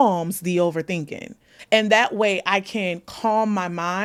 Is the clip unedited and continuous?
yes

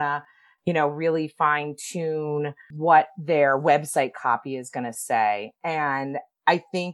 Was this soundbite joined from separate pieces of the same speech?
no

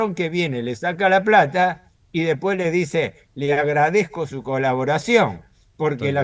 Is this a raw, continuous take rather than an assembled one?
yes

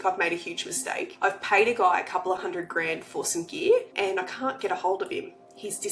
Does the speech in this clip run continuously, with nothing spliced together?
no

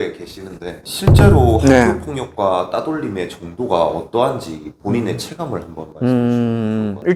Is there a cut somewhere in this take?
no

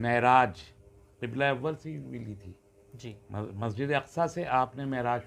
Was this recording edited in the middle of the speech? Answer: no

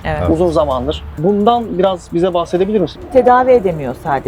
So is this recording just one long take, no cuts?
no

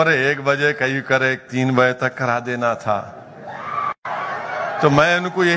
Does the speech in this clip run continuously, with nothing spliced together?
yes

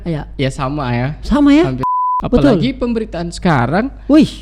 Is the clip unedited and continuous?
no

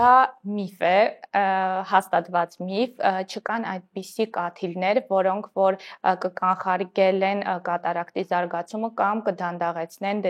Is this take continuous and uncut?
yes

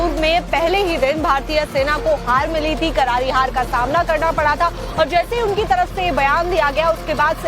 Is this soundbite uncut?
no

